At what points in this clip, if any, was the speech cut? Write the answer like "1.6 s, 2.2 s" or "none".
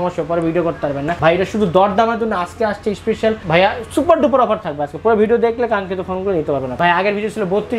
1.1 s, 3.4 s, 6.7 s